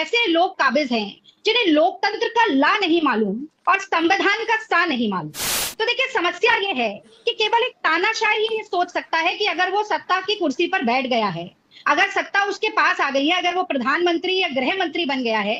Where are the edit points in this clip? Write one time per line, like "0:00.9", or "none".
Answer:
none